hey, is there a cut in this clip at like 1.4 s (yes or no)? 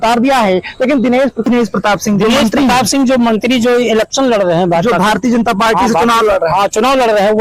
yes